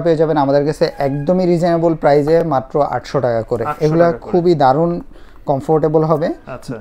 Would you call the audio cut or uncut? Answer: uncut